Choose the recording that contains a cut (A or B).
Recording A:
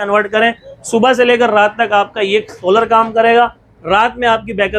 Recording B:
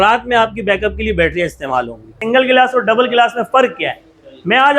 B